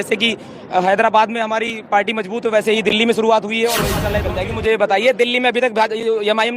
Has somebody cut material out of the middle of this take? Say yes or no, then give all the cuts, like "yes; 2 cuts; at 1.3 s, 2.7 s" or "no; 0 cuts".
yes; 1 cut; at 4.2 s